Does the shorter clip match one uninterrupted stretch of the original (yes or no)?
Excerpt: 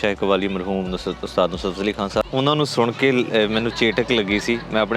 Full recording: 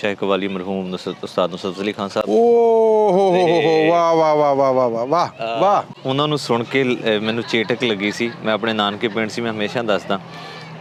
no